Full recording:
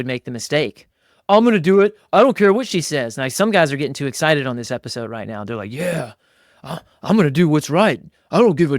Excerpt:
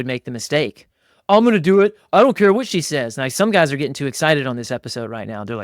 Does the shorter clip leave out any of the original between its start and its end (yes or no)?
no